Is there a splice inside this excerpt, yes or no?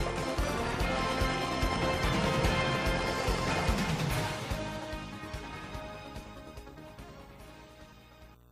no